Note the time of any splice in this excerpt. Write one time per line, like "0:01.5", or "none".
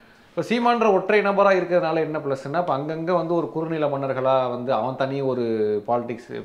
none

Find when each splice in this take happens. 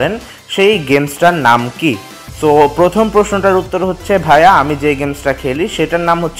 none

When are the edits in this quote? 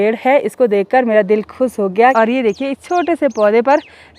0:02.1

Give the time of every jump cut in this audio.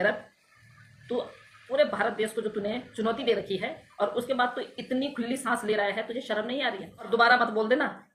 0:07.1

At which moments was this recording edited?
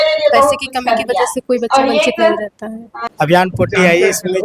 0:02.8

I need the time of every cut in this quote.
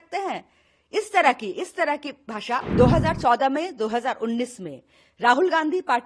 0:02.7

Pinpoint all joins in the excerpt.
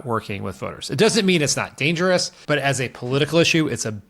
0:02.3

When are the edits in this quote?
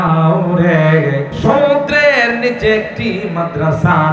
0:01.3

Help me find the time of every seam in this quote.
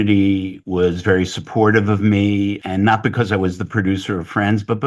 0:02.6

